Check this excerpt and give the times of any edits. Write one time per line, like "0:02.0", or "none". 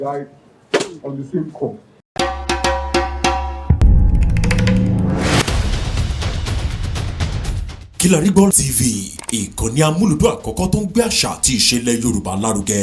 0:01.9